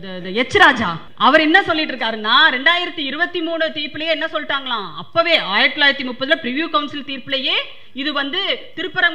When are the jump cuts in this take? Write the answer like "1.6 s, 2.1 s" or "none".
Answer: 1.0 s